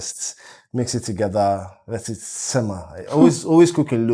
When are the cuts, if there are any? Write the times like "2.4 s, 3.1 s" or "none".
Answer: none